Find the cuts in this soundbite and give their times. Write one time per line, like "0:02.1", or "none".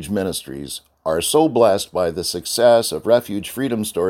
none